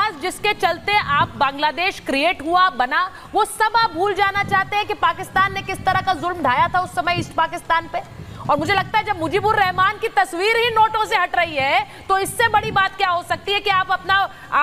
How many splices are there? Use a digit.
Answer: 0